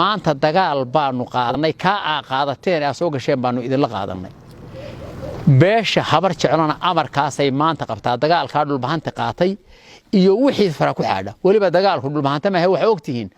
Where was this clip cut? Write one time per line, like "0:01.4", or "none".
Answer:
0:01.6